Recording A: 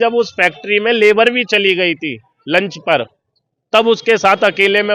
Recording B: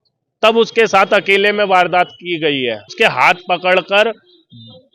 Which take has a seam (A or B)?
B